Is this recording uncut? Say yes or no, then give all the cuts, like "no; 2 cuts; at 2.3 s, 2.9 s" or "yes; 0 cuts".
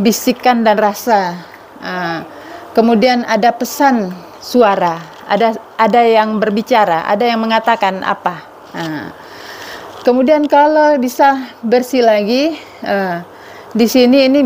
yes; 0 cuts